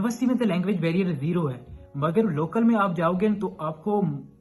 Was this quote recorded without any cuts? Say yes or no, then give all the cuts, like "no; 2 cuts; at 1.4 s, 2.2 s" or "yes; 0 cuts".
yes; 0 cuts